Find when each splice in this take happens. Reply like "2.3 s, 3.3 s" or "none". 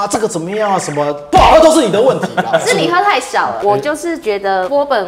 3.6 s